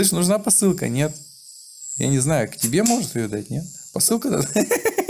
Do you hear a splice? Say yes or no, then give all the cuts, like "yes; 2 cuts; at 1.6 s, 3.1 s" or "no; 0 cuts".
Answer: no; 0 cuts